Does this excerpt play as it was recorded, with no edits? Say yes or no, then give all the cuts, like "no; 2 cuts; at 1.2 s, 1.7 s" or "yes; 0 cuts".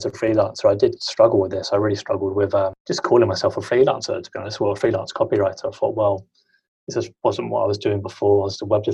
no; 1 cut; at 2.8 s